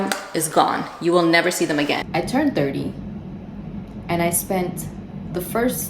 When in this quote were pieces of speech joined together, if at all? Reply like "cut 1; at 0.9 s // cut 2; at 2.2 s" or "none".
cut 1; at 2.0 s